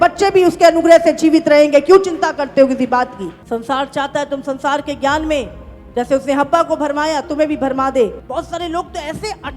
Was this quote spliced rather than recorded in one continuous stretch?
yes; 2 cuts; at 3.3 s, 8.2 s

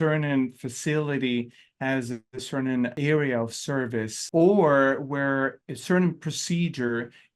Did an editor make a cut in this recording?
yes; 2 cuts; at 3.0 s, 4.2 s

